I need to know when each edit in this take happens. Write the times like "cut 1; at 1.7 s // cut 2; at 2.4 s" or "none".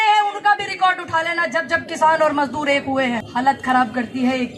cut 1; at 3.2 s